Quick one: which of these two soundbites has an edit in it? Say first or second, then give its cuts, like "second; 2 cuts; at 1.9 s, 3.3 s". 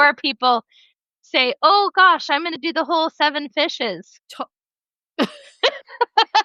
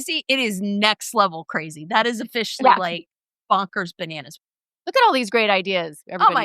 second; 1 cut; at 4.2 s